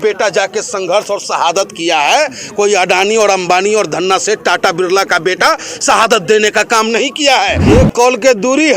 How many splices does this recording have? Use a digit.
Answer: 1